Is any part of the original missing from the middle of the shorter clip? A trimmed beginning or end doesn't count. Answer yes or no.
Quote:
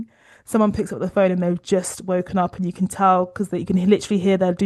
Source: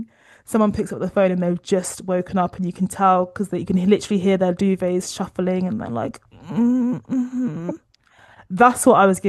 no